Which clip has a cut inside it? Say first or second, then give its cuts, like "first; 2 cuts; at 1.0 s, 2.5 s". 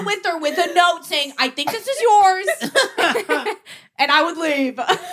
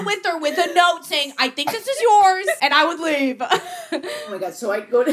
second; 2 cuts; at 2.6 s, 4.1 s